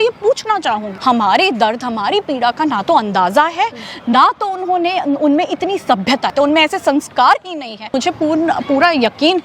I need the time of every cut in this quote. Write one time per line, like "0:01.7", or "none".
0:00.9
0:06.3
0:07.9